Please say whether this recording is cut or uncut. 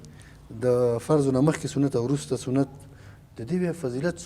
uncut